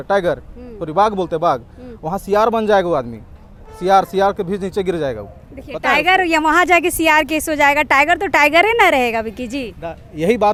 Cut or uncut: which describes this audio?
uncut